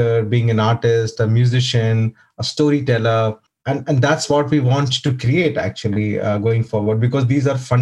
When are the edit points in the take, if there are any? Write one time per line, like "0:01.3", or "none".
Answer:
0:03.4